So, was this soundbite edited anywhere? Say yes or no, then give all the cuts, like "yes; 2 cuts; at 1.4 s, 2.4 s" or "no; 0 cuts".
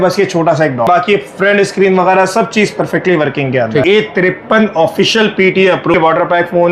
yes; 3 cuts; at 0.9 s, 3.8 s, 5.9 s